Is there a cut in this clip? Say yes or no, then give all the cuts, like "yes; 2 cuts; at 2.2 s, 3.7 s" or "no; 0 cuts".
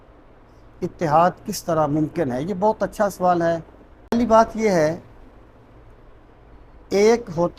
yes; 1 cut; at 4.1 s